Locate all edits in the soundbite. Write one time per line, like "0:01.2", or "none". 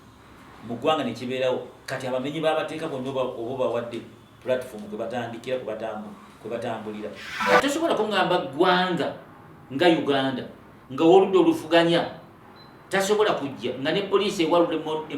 0:07.3